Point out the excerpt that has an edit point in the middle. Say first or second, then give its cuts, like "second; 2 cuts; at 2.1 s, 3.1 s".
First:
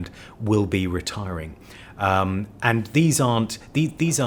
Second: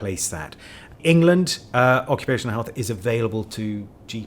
second; 1 cut; at 1.0 s